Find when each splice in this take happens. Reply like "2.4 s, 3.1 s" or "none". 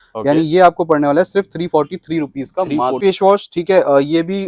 3.0 s